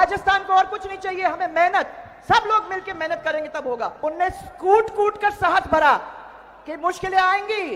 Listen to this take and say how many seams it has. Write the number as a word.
one